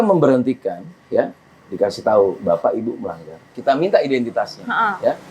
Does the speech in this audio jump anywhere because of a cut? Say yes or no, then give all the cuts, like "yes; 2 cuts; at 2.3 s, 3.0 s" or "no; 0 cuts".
yes; 1 cut; at 3.4 s